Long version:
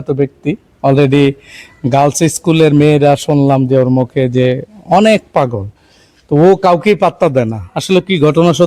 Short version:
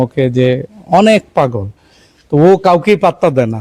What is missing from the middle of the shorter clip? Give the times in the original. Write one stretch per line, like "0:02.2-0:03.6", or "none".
none